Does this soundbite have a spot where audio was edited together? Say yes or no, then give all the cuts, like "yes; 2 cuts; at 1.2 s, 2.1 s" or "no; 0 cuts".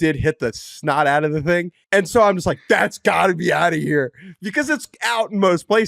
yes; 1 cut; at 1.8 s